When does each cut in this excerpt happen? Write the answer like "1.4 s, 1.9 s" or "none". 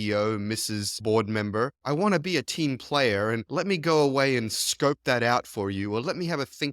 0.9 s